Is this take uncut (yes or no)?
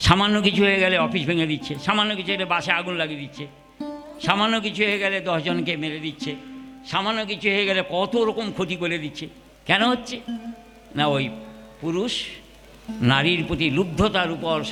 yes